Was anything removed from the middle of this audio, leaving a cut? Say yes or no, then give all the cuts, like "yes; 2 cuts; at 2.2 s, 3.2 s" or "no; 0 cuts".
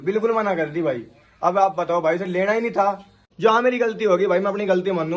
yes; 1 cut; at 3.2 s